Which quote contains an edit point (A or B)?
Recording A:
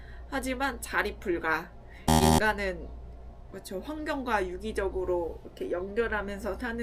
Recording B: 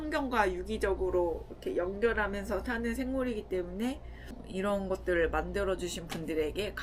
B